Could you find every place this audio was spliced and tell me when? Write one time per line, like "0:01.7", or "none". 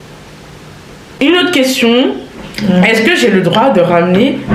0:01.2